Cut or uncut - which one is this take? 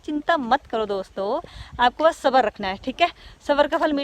uncut